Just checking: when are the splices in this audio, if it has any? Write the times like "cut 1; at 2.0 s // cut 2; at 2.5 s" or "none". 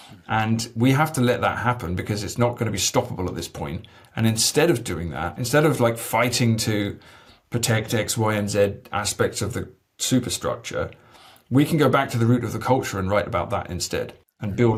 none